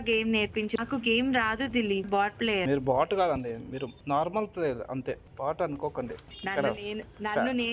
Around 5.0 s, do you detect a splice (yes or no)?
no